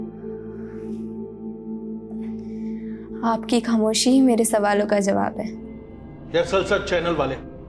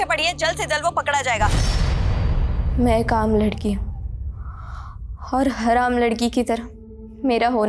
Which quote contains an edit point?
second; 1 cut; at 1.6 s

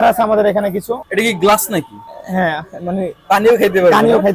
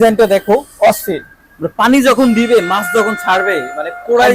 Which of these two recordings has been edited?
first; 1 cut; at 1.0 s

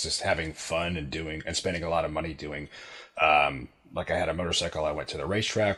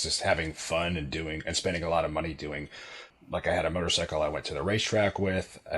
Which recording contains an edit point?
second; 1 cut; at 3.0 s

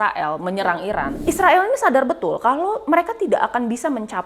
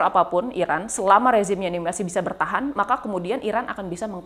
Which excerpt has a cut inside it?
first; 1 cut; at 1.2 s

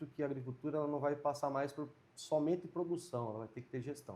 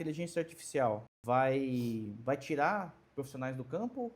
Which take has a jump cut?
second; 2 cuts; at 1.1 s, 2.1 s

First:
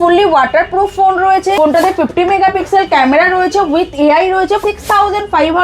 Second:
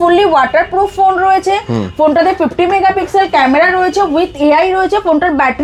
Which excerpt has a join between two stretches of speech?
first; 2 cuts; at 1.6 s, 4.6 s

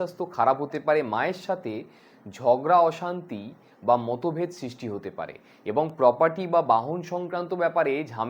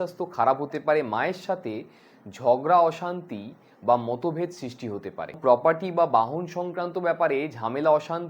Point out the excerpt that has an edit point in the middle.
second; 1 cut; at 5.4 s

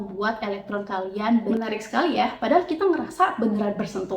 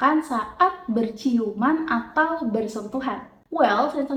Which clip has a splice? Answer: first; 1 cut; at 1.5 s

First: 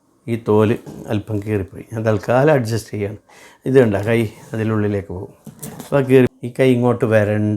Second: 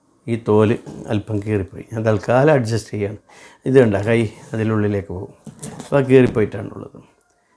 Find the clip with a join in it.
first; 1 cut; at 6.3 s

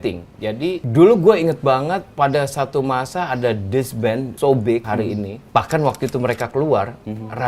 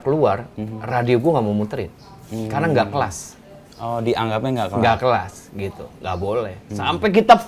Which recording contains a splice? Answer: first; 4 cuts; at 0.8 s, 2.1 s, 4.3 s, 4.9 s

